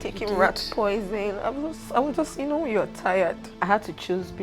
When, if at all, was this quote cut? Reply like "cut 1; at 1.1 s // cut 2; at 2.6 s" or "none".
cut 1; at 3.5 s